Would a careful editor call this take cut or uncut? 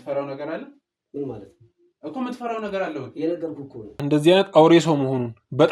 cut